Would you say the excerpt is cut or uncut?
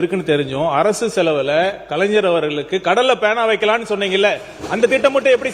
uncut